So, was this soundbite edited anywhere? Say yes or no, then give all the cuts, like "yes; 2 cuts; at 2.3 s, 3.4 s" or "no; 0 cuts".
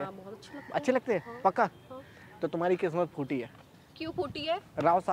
no; 0 cuts